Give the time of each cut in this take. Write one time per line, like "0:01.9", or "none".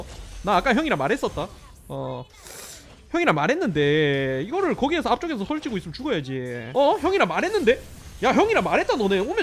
0:06.6